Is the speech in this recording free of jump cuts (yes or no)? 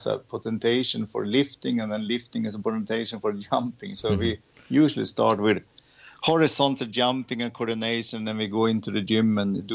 yes